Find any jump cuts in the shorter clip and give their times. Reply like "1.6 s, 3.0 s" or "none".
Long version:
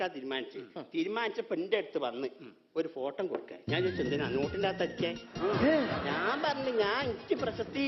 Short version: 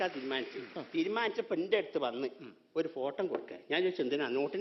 none